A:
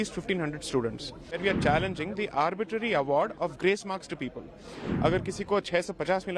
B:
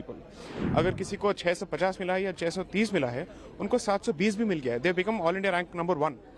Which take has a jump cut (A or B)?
A